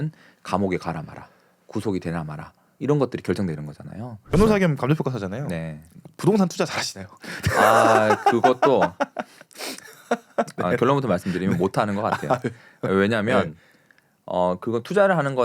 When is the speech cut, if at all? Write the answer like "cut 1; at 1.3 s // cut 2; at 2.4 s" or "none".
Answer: cut 1; at 4.2 s